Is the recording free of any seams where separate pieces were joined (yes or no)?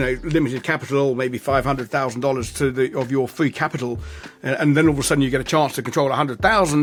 yes